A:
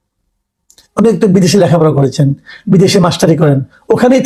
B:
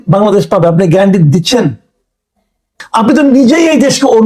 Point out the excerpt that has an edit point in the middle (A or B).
B